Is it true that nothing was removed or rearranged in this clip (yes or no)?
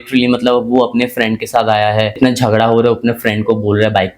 no